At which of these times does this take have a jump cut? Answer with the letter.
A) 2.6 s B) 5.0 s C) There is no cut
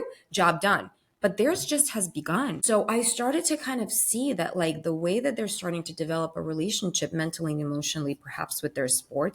A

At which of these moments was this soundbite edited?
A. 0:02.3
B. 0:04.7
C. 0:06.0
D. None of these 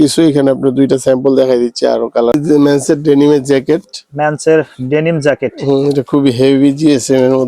A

